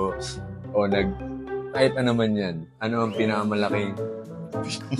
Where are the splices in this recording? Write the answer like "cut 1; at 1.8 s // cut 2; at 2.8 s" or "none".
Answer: none